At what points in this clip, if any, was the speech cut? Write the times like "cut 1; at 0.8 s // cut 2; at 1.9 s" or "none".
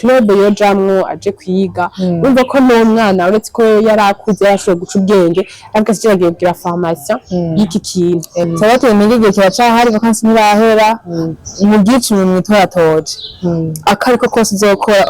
cut 1; at 8.5 s